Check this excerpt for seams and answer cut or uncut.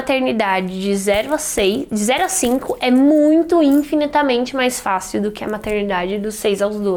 uncut